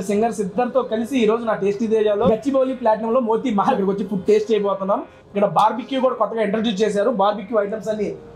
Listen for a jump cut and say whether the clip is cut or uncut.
uncut